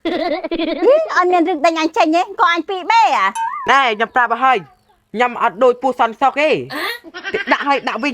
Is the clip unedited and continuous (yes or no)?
no